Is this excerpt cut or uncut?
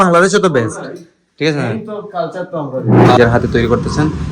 cut